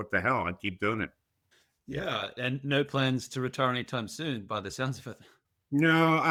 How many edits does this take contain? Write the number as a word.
zero